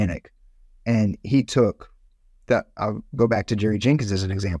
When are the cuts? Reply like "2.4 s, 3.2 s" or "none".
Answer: none

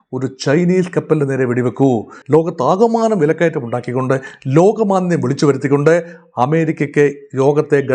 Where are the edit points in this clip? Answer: 2.1 s

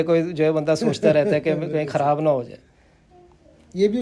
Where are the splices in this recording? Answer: none

